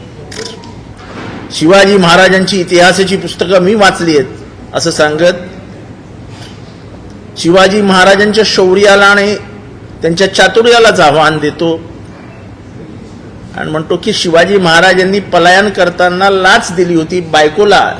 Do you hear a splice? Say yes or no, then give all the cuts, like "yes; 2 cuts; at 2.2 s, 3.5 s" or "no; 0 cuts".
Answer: no; 0 cuts